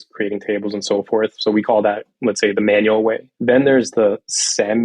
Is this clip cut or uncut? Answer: cut